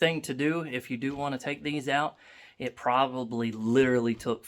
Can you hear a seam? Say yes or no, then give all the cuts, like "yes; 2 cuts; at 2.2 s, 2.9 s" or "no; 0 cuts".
no; 0 cuts